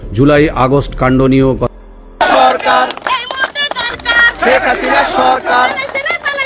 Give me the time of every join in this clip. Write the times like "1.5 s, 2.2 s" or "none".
1.7 s